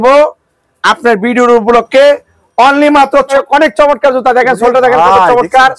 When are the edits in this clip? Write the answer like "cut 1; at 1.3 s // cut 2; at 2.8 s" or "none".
cut 1; at 3.3 s